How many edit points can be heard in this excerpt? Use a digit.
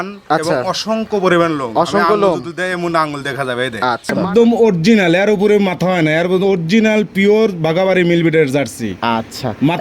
1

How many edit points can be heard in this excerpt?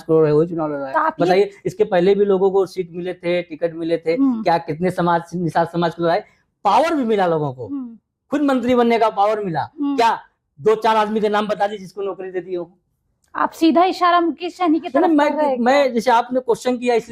0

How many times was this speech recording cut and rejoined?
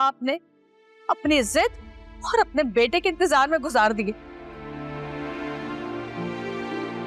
0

